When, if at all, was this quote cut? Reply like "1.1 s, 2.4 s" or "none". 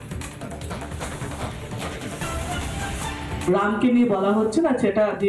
1.1 s, 3.5 s